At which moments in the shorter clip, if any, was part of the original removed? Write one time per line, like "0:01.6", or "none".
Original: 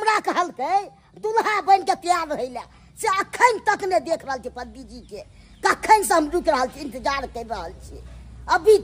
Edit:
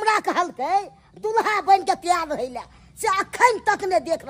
none